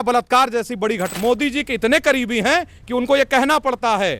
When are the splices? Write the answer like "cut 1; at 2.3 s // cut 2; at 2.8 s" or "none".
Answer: cut 1; at 1.1 s